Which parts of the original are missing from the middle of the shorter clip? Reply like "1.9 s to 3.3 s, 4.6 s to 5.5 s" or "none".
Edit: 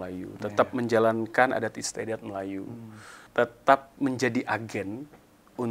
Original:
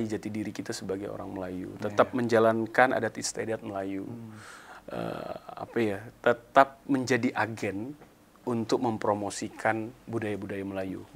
4.6 s to 6.1 s

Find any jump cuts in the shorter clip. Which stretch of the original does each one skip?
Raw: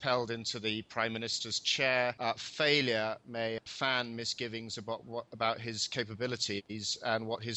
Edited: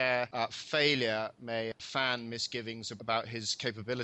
4.8 s to 5.3 s

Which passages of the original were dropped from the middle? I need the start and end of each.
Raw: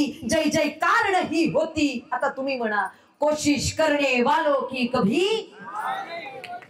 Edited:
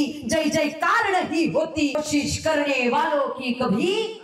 2.0 s to 3.3 s

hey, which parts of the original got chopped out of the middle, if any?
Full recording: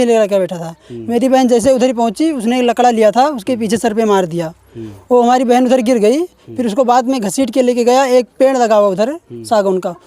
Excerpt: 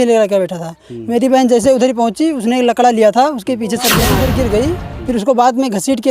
4.1 s to 5.6 s

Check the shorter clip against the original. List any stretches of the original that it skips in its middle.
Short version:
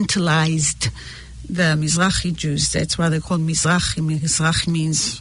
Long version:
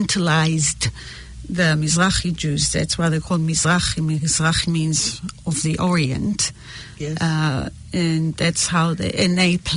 none

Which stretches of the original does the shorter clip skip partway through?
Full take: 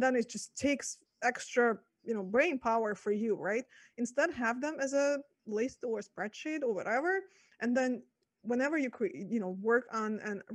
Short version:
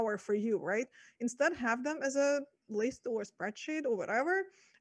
none

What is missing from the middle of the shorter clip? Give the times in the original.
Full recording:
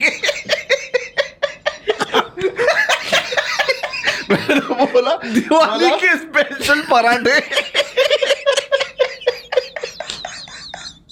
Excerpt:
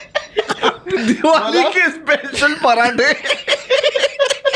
2.5 s to 5.3 s

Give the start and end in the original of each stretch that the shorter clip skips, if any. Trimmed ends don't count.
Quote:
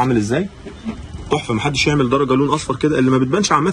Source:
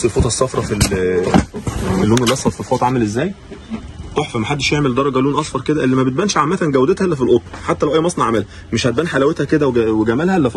none

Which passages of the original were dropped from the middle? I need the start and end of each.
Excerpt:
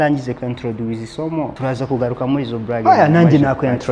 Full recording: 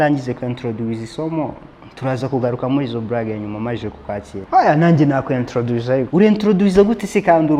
1.5 s to 2.0 s, 3.2 s to 4.5 s

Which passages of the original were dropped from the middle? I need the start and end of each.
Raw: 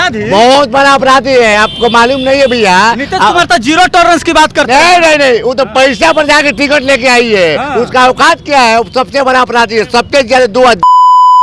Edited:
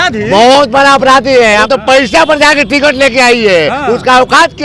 1.6 s to 5.5 s

